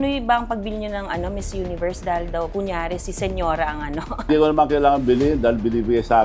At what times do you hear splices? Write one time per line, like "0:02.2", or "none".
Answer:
0:04.3

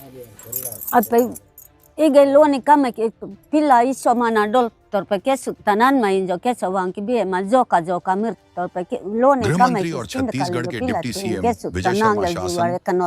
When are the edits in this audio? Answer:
none

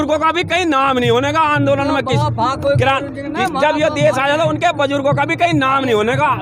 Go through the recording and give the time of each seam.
none

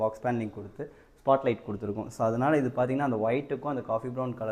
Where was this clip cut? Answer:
none

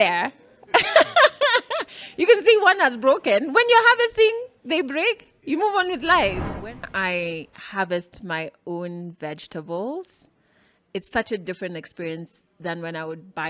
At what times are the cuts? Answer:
0:06.8

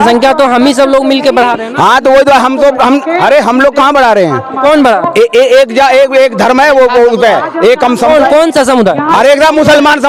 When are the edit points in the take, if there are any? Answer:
none

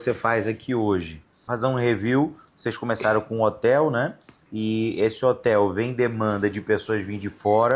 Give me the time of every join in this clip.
0:01.5

